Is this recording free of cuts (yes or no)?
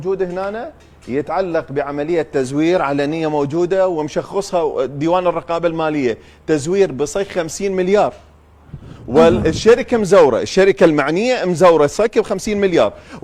yes